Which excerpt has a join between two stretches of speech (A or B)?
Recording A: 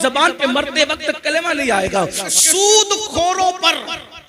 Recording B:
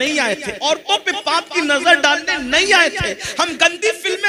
A